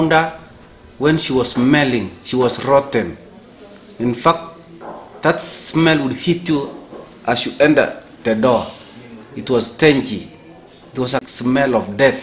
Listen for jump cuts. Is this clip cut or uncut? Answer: cut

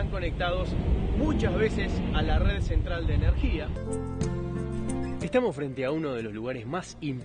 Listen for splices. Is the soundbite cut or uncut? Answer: cut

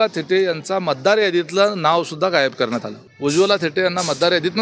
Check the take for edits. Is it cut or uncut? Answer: cut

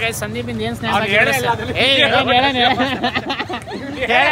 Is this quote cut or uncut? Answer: uncut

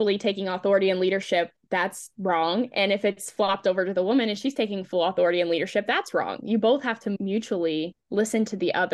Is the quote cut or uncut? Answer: uncut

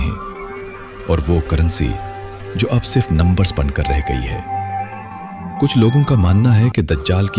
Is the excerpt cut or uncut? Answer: uncut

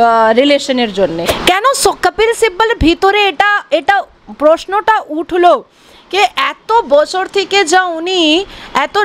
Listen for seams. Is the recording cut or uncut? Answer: cut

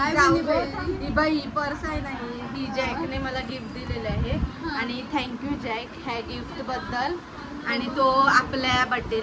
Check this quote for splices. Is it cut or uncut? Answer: uncut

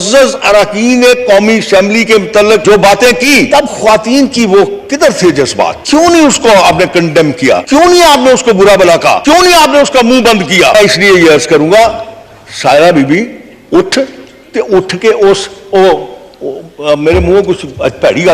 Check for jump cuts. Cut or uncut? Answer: cut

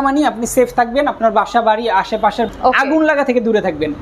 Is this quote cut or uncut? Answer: cut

